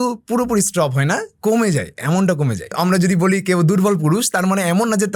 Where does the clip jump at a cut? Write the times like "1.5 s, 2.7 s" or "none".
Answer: 2.7 s

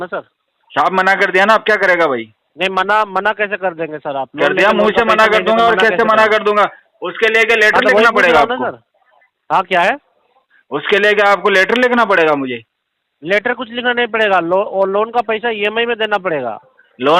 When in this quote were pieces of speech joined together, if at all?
none

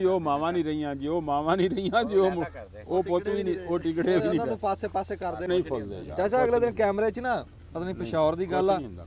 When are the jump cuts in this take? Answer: 5.5 s

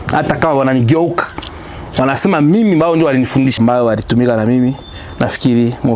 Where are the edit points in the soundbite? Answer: 3.6 s

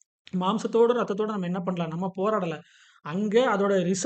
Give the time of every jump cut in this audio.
none

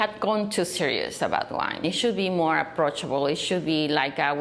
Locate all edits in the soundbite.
1.8 s

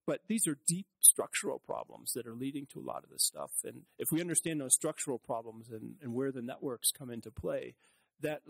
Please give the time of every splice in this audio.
3.8 s

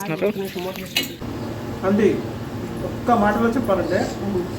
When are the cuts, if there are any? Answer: 1.2 s

